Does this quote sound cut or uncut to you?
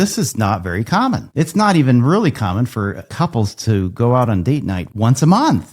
cut